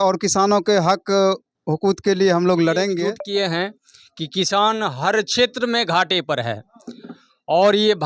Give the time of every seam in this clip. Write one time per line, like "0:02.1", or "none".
0:03.1

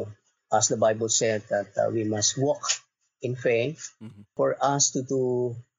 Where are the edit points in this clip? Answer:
0:04.3

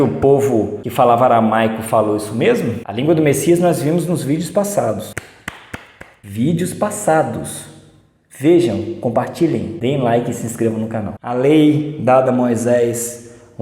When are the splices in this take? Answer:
0:02.8
0:11.1

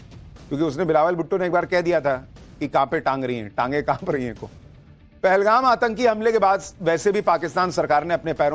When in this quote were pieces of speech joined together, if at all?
0:03.2

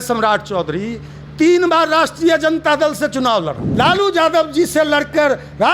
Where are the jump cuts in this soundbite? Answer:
0:03.6

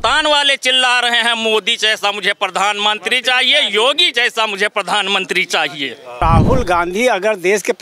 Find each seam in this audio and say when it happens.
0:06.2

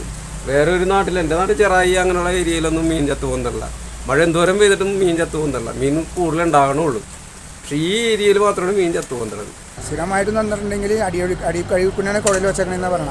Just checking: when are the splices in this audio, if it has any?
0:09.8

